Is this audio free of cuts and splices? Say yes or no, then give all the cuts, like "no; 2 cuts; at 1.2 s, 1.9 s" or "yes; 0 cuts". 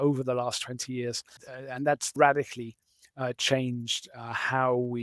no; 1 cut; at 1.6 s